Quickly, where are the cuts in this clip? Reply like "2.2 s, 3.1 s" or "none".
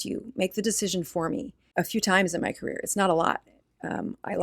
1.6 s